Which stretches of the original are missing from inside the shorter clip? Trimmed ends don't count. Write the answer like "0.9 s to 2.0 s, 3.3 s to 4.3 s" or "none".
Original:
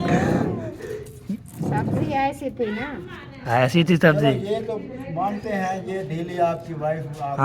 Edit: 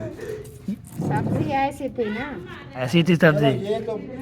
3.5 s to 3.7 s